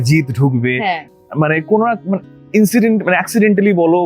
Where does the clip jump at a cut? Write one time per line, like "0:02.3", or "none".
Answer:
none